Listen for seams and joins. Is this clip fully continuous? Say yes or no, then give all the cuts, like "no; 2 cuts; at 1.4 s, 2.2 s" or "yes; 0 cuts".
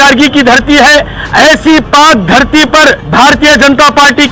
no; 1 cut; at 3.0 s